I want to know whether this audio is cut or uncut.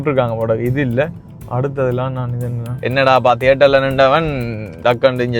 cut